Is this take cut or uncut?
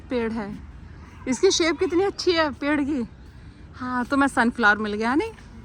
uncut